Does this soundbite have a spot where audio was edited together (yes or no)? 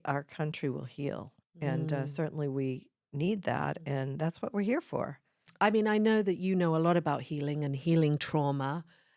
no